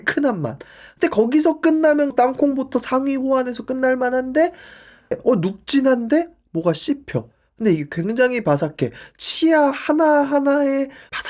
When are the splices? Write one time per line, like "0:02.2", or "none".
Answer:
0:02.1
0:05.1